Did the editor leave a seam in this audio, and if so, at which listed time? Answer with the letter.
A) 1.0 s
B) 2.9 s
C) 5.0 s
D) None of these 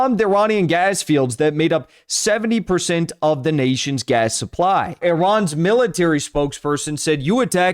C